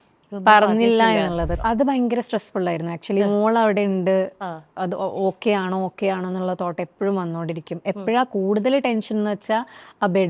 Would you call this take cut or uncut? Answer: cut